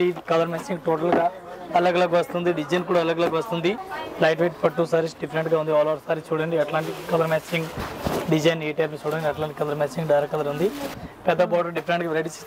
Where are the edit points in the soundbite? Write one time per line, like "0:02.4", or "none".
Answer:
0:03.9
0:11.0